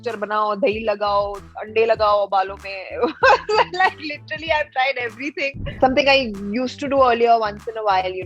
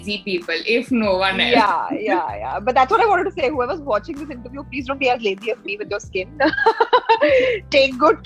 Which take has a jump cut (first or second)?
first